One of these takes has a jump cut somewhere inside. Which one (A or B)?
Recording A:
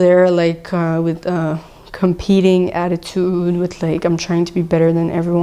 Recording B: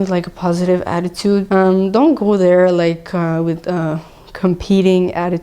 B